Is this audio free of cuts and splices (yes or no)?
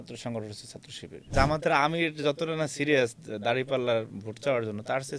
no